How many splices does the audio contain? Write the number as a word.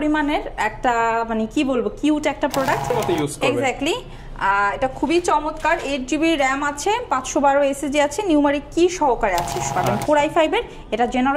two